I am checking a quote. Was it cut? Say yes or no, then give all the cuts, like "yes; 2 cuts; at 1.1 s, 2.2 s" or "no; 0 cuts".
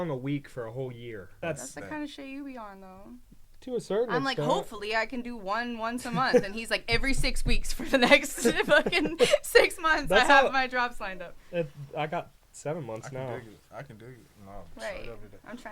yes; 1 cut; at 1.3 s